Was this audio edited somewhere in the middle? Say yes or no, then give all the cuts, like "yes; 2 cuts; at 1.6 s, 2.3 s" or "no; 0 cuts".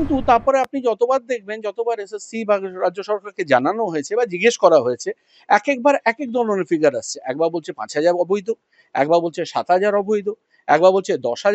no; 0 cuts